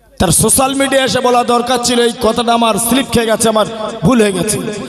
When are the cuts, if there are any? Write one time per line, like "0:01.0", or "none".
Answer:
none